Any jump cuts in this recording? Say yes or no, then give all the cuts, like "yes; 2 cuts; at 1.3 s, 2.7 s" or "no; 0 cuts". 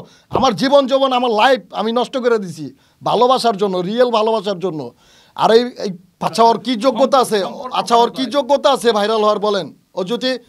yes; 1 cut; at 6.1 s